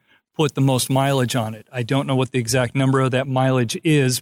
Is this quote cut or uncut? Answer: cut